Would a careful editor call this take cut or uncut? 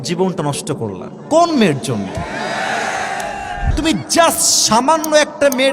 cut